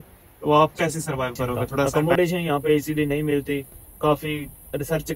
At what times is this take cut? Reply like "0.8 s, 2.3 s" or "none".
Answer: 1.9 s